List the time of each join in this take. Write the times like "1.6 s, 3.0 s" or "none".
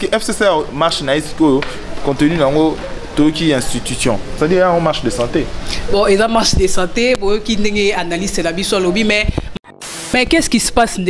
9.6 s